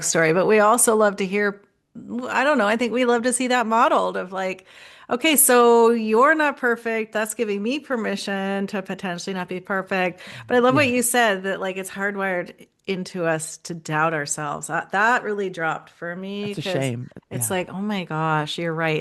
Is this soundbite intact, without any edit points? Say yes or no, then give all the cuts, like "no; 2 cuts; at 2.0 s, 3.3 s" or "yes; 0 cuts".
yes; 0 cuts